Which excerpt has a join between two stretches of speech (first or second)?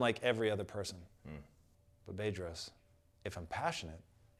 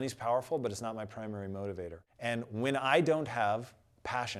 second